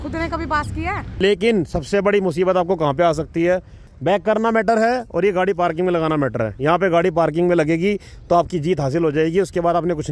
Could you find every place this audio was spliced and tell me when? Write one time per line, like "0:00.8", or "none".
0:01.2
0:03.8